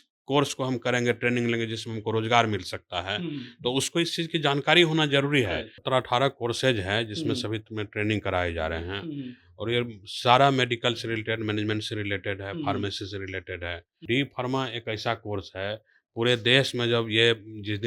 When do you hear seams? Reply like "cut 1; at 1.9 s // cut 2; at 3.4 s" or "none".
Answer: cut 1; at 5.7 s // cut 2; at 13.9 s